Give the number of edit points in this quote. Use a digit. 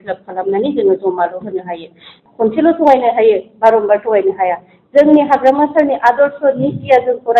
1